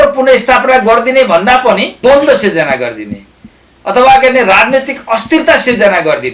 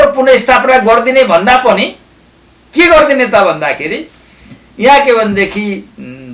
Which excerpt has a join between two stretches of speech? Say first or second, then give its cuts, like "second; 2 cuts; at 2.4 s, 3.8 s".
first; 1 cut; at 1.9 s